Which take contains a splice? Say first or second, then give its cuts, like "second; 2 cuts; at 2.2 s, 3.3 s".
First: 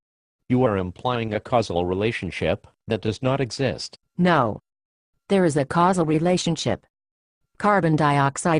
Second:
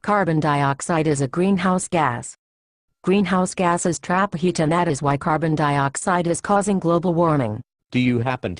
first; 1 cut; at 3.4 s